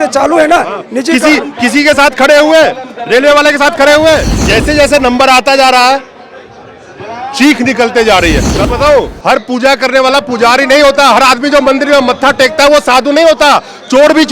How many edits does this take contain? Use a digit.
2